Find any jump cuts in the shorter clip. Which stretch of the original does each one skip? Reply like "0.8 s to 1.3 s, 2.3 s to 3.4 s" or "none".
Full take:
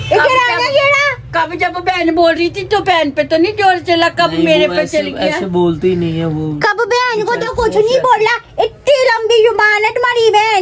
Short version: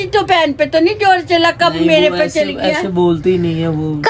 none